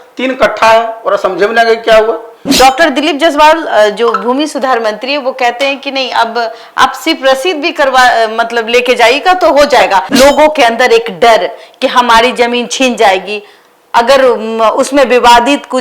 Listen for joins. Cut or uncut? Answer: cut